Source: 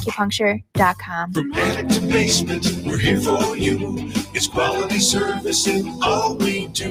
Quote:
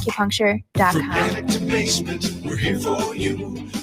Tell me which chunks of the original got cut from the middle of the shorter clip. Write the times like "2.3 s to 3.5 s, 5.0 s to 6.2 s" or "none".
0.9 s to 1.3 s